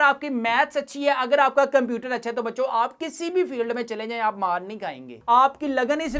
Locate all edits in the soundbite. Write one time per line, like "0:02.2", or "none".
0:05.2

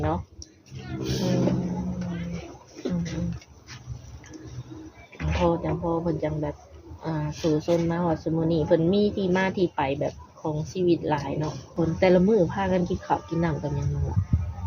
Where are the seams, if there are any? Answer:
0:11.7

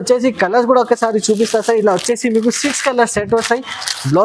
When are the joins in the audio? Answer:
none

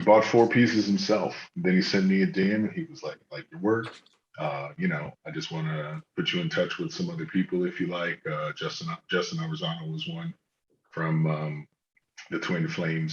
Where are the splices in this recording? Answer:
none

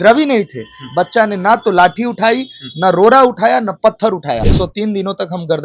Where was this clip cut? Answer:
0:04.5

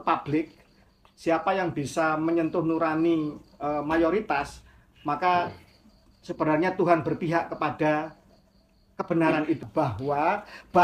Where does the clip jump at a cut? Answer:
0:09.7

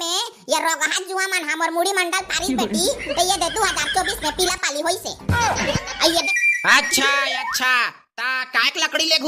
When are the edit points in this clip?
0:06.3

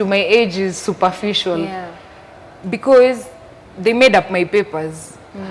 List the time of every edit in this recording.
none

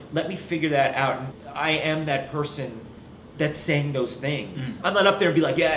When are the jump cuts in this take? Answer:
0:01.3

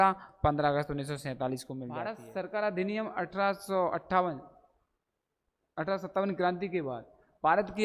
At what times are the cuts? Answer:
0:01.8

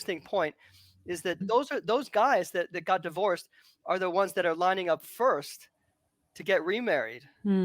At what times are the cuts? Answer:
0:01.4

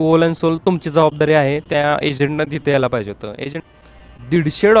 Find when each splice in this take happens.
0:03.6

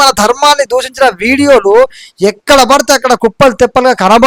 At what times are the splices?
none

